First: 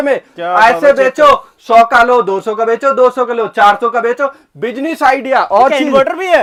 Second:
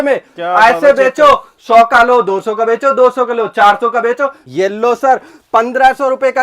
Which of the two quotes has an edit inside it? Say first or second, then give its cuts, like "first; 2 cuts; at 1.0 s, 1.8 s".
second; 1 cut; at 4.4 s